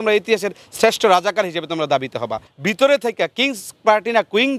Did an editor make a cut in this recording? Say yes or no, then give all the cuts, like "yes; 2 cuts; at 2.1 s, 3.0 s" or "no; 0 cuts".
yes; 1 cut; at 2.5 s